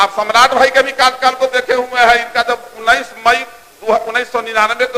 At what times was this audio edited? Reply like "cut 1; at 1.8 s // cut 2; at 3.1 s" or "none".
none